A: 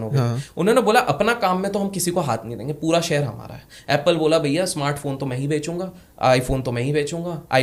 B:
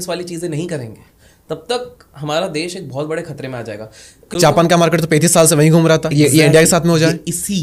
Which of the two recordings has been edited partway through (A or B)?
B